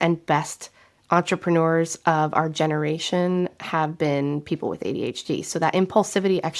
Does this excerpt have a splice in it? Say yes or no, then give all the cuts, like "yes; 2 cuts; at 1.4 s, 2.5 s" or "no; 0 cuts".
no; 0 cuts